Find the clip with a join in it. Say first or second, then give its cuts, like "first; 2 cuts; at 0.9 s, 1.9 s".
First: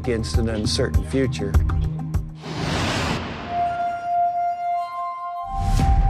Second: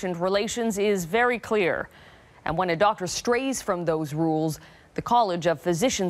first; 1 cut; at 4.7 s